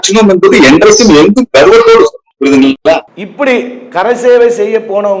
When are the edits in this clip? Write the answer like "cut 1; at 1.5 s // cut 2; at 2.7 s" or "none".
none